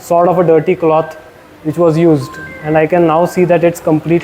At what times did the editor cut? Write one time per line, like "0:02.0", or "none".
none